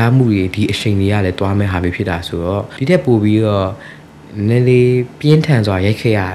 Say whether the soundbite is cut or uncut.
cut